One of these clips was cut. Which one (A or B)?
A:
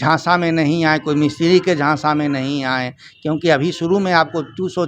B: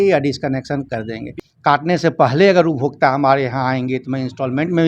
B